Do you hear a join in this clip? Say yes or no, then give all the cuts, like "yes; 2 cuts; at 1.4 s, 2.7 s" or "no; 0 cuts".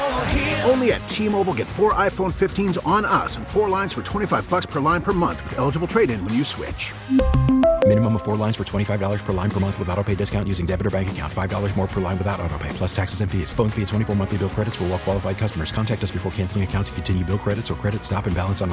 no; 0 cuts